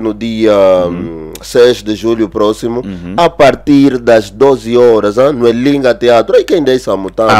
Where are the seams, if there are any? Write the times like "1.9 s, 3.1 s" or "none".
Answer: none